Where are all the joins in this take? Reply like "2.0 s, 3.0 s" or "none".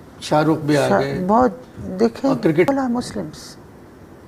2.7 s